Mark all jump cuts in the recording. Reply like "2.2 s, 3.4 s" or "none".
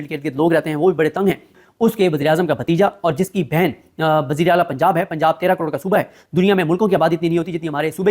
1.6 s